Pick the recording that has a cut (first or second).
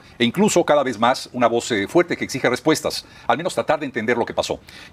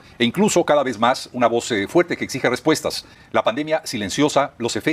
second